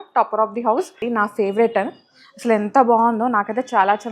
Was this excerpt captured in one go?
no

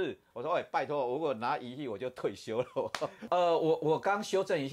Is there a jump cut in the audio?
yes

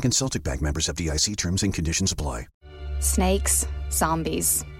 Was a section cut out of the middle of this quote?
yes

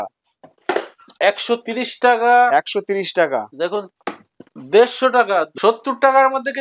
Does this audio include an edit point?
yes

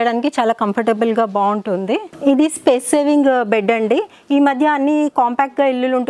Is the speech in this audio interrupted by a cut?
yes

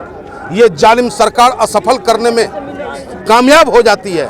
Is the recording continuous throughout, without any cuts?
yes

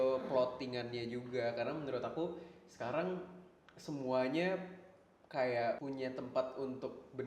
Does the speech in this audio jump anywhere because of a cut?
yes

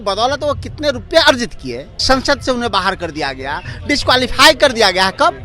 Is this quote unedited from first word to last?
no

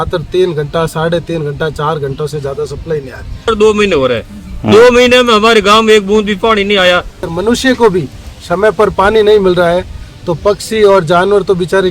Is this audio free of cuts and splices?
no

